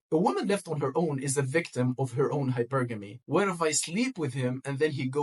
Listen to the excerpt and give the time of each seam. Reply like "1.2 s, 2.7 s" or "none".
3.1 s